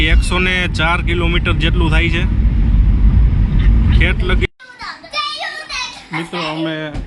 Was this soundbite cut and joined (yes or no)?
yes